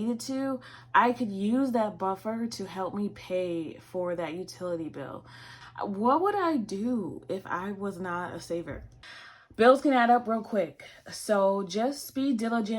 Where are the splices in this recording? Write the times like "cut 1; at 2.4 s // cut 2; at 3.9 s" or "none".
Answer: cut 1; at 5.6 s // cut 2; at 8.9 s